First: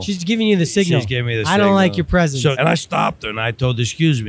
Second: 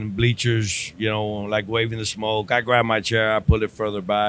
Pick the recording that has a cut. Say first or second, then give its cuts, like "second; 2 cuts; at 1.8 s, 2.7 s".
first; 1 cut; at 2.6 s